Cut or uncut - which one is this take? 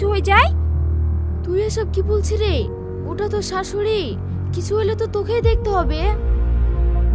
uncut